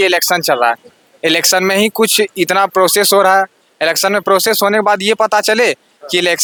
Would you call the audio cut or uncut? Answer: uncut